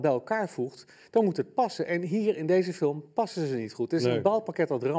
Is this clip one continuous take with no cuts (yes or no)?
yes